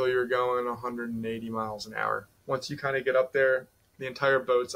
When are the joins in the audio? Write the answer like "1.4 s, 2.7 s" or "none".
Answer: 2.3 s